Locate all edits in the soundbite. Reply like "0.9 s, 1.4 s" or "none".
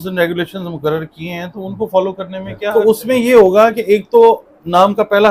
2.7 s